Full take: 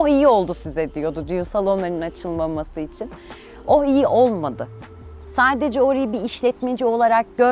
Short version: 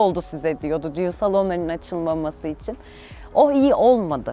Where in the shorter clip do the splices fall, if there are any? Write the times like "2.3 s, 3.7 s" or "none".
none